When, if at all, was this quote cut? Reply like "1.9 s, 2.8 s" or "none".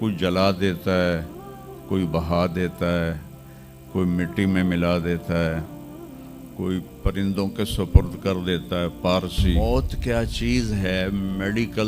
9.6 s